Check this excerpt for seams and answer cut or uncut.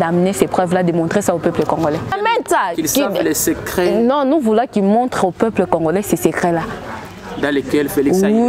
cut